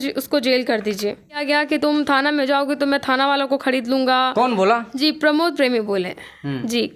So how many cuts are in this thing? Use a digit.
1